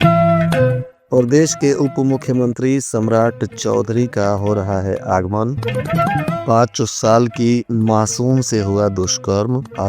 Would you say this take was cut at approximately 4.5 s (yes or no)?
no